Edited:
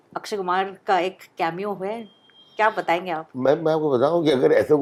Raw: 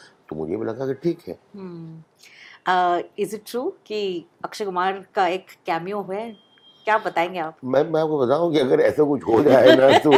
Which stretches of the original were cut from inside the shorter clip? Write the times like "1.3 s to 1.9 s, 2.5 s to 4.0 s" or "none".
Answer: none